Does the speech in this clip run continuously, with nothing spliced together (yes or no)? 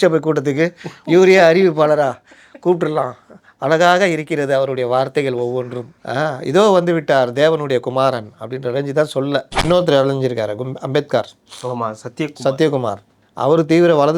no